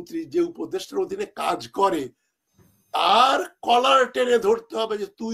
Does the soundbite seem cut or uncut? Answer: uncut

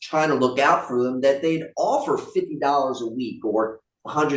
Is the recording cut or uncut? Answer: uncut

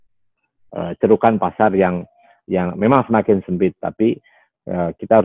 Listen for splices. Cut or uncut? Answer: uncut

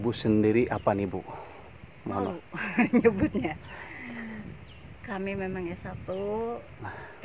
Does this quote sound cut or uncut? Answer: uncut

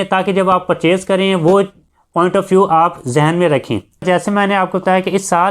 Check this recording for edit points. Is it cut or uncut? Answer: cut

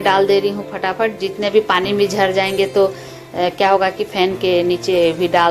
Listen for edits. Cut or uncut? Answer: uncut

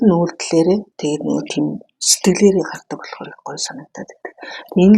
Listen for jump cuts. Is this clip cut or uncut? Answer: cut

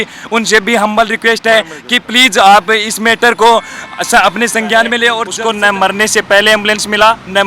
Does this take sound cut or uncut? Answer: cut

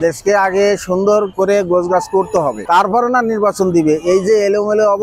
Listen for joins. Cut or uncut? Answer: uncut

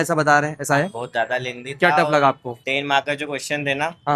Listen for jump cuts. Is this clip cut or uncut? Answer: cut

